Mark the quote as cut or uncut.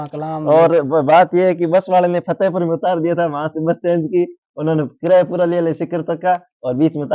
uncut